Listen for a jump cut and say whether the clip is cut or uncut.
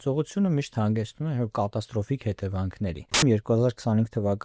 cut